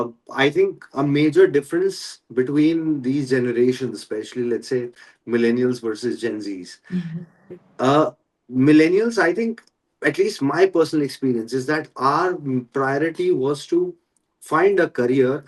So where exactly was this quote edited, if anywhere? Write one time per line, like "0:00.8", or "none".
none